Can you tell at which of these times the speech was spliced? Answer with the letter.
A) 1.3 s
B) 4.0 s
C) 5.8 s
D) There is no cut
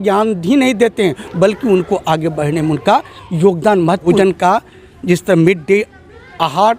B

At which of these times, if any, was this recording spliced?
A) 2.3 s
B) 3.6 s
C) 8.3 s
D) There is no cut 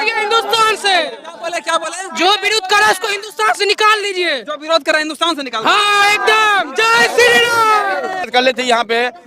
C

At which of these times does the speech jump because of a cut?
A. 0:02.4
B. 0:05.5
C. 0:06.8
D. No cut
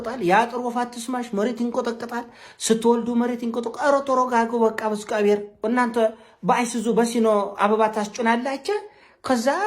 B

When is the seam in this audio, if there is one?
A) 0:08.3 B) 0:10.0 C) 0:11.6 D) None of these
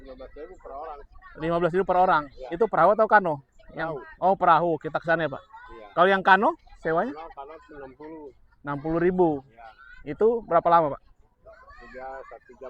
D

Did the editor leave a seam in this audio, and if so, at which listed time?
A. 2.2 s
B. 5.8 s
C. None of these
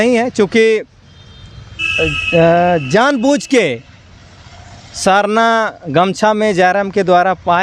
C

